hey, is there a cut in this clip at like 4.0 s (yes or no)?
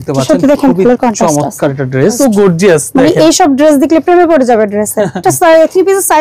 no